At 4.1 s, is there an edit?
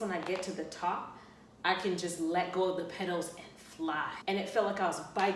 yes; 1 cut; at 4.1 s

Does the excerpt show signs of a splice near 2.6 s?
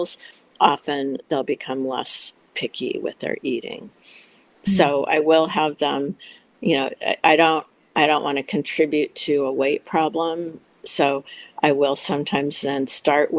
no; 0 cuts

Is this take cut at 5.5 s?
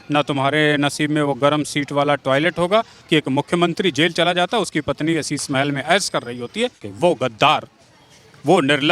no; 2 cuts; at 3.0 s, 6.8 s

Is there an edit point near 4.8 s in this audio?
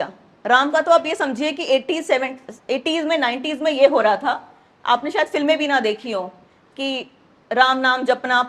no; 0 cuts

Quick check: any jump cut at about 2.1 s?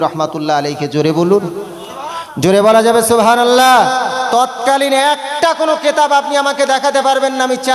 no; 0 cuts

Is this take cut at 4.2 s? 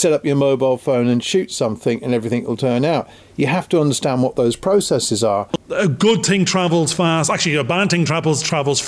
no; 1 cut; at 5.6 s

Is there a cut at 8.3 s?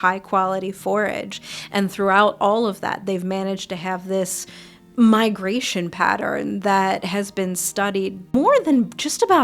yes; 1 cut; at 8.3 s

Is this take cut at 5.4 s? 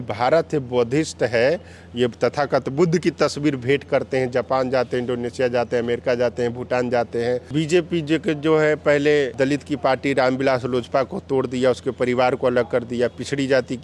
no; 2 cuts; at 7.5 s, 9.3 s

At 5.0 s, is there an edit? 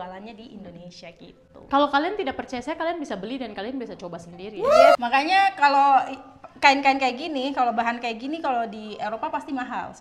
yes; 1 cut; at 5.0 s

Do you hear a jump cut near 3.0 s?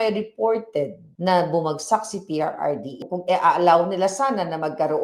yes; 1 cut; at 3.0 s

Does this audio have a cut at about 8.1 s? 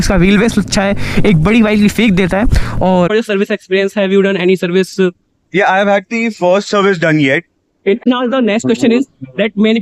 yes; 2 cuts; at 3.1 s, 8.1 s

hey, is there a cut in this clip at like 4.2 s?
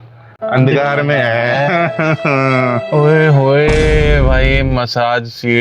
no; 1 cut; at 2.8 s

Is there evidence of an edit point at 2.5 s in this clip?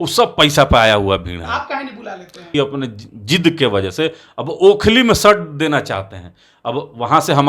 yes; 1 cut; at 2.5 s

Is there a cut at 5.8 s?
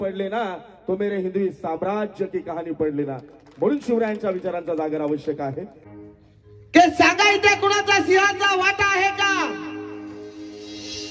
yes; 1 cut; at 5.8 s

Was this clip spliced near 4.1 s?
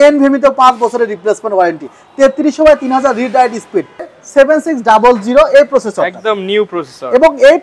yes; 1 cut; at 4.1 s

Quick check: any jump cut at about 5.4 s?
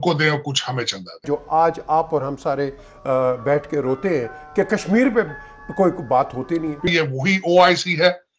no; 2 cuts; at 1.2 s, 6.8 s

